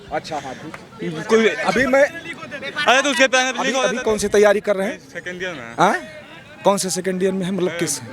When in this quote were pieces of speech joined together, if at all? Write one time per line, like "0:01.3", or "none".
0:03.8